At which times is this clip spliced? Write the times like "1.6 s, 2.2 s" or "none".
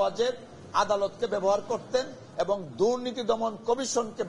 none